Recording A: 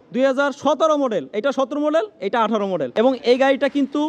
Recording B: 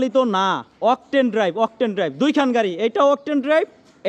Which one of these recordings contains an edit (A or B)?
A